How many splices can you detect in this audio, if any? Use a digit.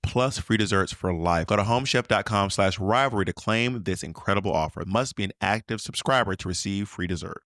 2